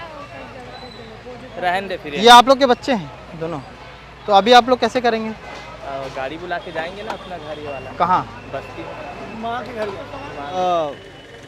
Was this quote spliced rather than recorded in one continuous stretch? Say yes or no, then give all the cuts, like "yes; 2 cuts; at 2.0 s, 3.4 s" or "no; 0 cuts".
yes; 1 cut; at 10.5 s